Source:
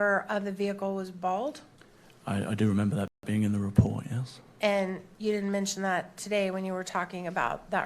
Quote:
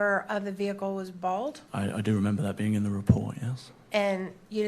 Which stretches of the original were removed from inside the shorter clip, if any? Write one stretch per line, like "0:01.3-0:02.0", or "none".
0:01.6-0:02.2
0:03.1-0:03.2

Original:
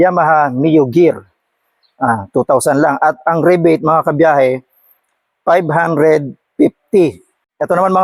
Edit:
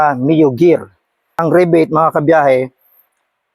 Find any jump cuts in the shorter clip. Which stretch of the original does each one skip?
0:01.7-0:03.2

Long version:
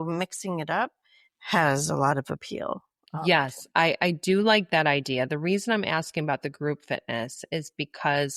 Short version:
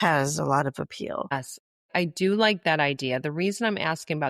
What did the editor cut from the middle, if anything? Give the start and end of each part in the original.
0:03.3-0:03.8

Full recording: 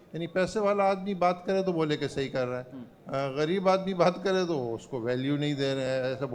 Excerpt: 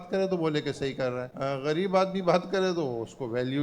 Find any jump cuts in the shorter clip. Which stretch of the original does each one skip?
0:02.6-0:03.0

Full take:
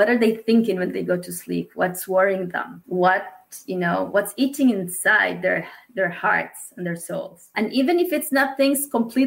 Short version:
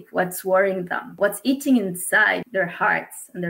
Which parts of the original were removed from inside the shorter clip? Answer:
0:02.8-0:04.1
0:05.4-0:05.9

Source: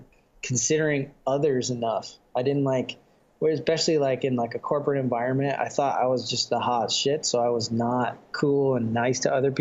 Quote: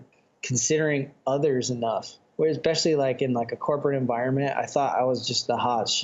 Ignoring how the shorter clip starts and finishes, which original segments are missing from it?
0:02.2-0:03.2

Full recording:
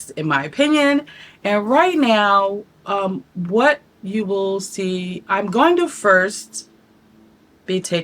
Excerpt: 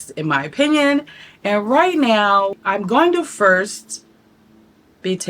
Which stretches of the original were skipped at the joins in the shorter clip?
0:02.6-0:05.2

